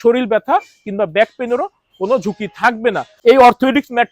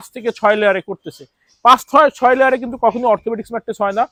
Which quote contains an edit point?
first; 1 cut; at 3.1 s

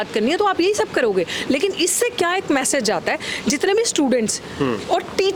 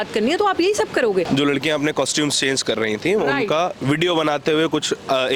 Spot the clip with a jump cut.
second; 1 cut; at 1.3 s

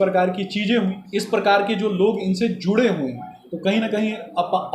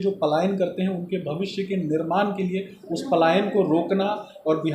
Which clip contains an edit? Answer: first; 1 cut; at 1.0 s

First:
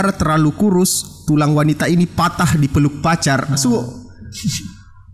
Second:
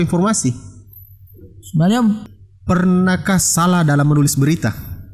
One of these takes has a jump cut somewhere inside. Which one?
second; 1 cut; at 2.3 s

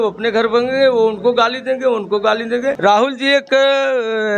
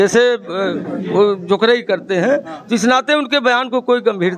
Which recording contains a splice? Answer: first; 1 cut; at 2.8 s

